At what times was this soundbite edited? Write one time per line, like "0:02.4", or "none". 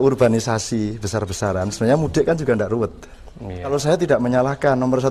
0:03.7